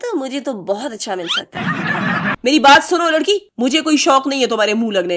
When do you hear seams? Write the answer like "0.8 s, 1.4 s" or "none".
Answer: 2.4 s

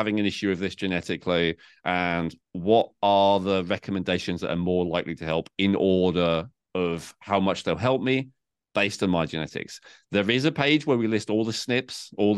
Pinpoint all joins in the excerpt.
none

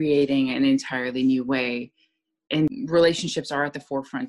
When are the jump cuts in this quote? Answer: 2.7 s

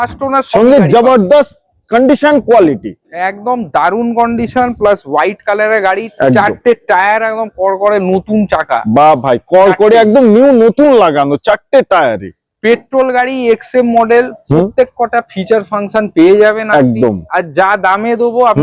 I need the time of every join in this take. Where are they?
none

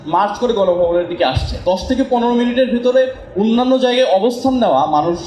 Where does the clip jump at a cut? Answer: 1.5 s

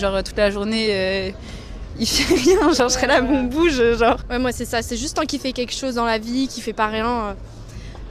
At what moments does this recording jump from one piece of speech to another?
none

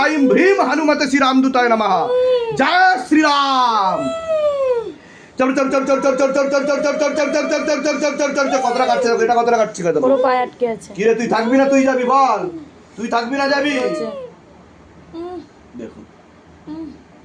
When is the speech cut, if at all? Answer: 14.0 s

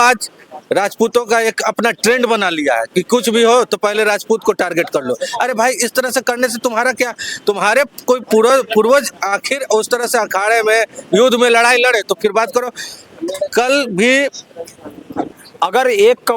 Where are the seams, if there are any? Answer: 15.3 s

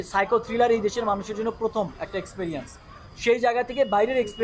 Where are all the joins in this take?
none

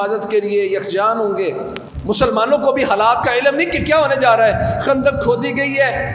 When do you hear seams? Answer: 1.9 s

